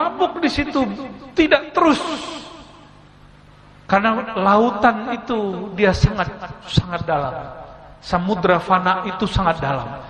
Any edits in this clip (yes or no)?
no